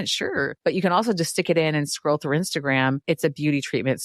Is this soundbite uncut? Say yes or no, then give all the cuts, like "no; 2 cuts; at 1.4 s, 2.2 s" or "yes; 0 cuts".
yes; 0 cuts